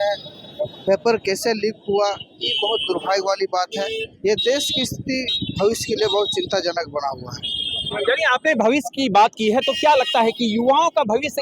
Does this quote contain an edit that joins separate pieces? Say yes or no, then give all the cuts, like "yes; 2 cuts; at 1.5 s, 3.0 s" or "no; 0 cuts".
no; 0 cuts